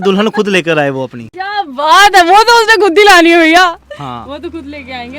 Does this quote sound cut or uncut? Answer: uncut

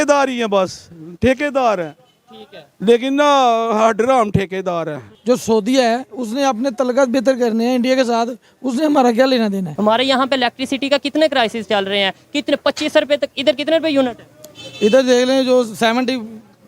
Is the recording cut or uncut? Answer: cut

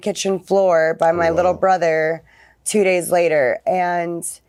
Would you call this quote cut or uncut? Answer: uncut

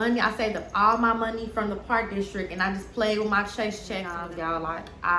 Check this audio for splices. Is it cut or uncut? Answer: cut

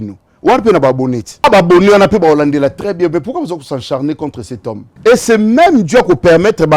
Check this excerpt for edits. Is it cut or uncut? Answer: cut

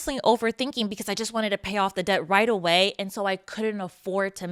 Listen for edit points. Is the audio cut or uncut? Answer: uncut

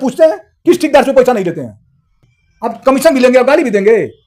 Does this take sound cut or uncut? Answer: cut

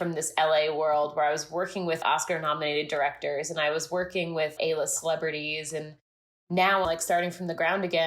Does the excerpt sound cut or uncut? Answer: cut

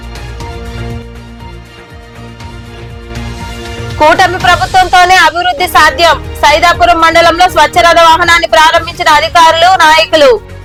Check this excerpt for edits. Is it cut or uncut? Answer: uncut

